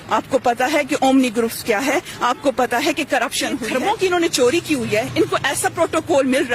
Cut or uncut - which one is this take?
cut